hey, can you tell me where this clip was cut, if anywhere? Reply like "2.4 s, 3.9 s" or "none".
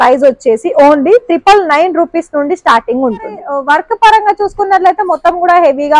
3.5 s